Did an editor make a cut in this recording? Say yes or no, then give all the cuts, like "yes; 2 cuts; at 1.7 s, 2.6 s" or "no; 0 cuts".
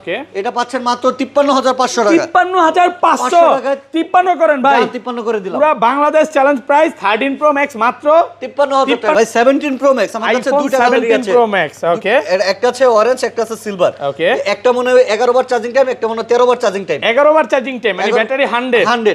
yes; 1 cut; at 9.1 s